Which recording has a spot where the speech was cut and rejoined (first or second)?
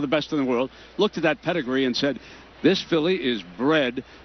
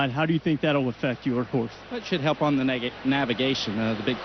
first